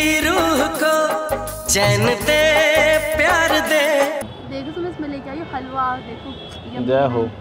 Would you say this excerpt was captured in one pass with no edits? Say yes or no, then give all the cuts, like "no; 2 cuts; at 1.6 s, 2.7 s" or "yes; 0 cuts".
yes; 0 cuts